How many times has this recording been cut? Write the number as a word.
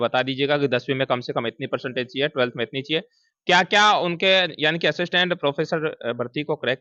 zero